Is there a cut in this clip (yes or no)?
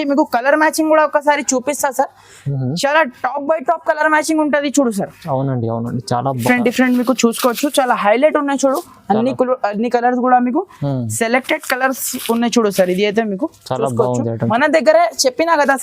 yes